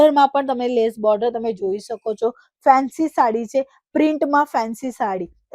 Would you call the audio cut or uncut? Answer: uncut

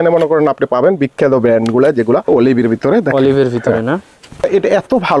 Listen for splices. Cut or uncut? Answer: cut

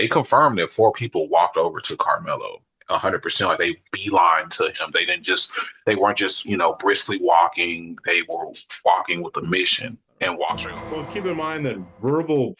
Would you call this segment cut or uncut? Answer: cut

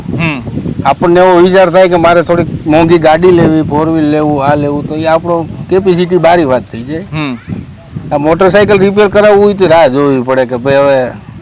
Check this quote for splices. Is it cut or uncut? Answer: uncut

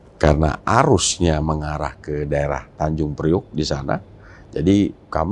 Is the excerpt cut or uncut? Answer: uncut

